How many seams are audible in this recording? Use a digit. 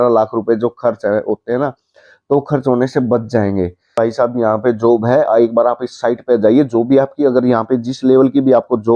1